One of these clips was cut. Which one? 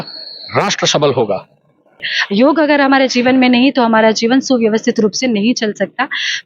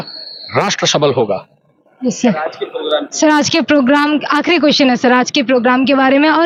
first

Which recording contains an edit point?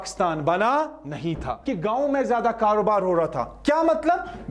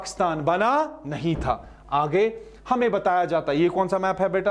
first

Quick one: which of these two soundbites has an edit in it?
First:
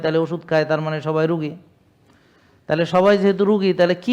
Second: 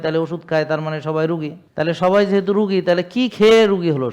second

